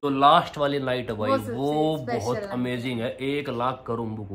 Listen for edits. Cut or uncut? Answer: uncut